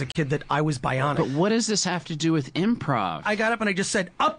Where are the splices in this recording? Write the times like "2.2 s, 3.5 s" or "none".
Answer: 1.1 s, 3.2 s